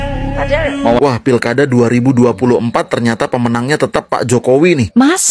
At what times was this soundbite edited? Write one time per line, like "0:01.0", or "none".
0:00.9